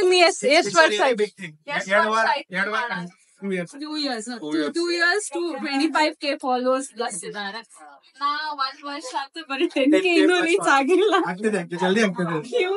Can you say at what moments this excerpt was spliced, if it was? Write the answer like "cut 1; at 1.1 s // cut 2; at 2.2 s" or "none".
none